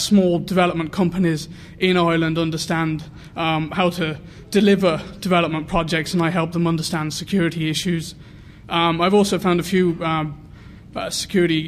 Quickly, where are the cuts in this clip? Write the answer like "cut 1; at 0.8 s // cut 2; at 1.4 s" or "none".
cut 1; at 9.6 s